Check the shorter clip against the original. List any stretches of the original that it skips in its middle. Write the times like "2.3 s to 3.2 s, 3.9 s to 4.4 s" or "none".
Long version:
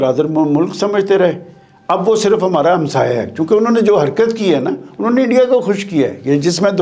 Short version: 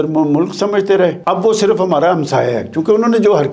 1.4 s to 1.8 s